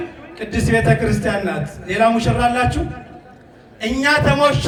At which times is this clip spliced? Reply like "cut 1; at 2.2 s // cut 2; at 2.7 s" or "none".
none